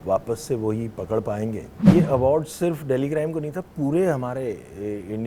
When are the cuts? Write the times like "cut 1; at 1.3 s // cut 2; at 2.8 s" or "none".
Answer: cut 1; at 1.7 s